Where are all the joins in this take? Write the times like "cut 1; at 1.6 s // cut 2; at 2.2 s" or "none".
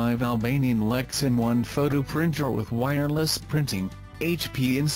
none